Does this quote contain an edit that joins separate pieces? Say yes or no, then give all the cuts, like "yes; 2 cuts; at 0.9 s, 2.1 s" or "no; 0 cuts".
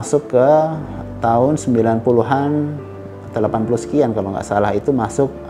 no; 0 cuts